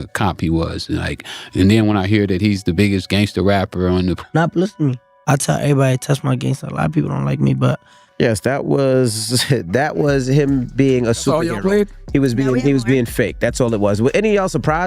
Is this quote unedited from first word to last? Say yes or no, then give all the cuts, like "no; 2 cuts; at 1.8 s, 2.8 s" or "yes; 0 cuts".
no; 1 cut; at 4.2 s